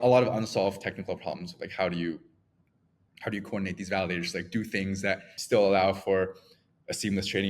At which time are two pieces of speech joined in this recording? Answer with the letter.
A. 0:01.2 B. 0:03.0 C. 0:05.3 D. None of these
C